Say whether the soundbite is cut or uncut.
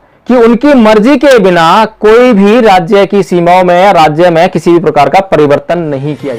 uncut